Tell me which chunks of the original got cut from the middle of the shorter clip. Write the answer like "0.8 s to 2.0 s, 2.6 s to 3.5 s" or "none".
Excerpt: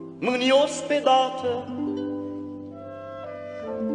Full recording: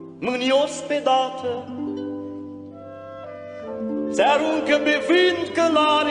none